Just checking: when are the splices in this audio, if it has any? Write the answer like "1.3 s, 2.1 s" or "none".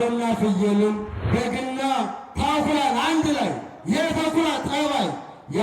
1.1 s